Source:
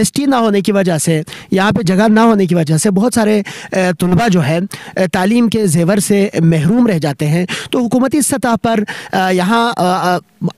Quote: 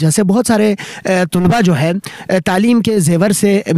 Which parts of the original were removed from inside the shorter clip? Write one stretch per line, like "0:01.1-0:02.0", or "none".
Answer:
none